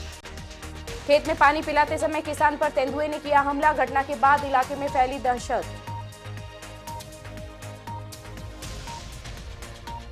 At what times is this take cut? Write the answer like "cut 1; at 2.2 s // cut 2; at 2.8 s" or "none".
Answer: none